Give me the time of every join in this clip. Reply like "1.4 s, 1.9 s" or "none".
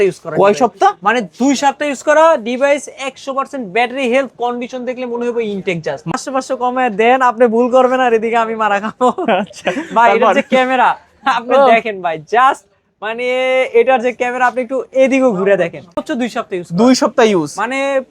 6.1 s, 16.0 s